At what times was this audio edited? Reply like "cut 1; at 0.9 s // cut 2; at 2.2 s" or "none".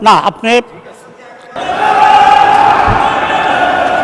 cut 1; at 1.5 s

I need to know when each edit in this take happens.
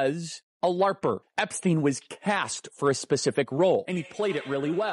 cut 1; at 1.3 s // cut 2; at 3.9 s

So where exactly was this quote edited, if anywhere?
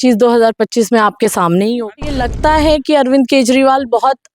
cut 1; at 2.3 s

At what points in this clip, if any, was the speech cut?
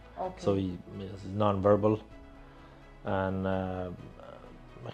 none

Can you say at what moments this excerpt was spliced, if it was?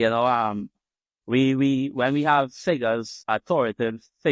cut 1; at 3.1 s

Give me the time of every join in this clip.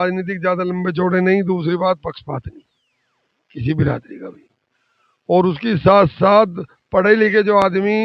none

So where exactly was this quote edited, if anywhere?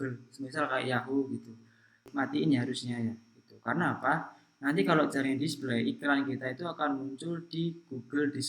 cut 1; at 2.0 s

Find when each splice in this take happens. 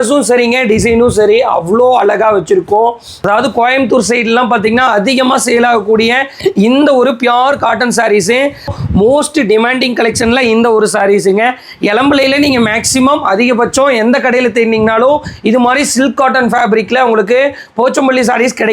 cut 1; at 3.1 s // cut 2; at 8.7 s

